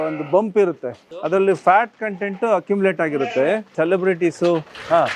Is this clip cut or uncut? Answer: cut